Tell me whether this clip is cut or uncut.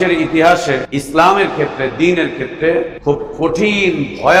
cut